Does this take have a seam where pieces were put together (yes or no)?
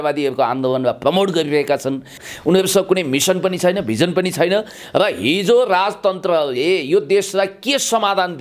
yes